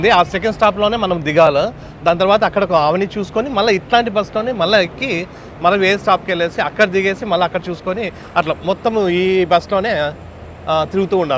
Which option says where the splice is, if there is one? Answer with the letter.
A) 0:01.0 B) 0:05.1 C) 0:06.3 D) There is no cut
D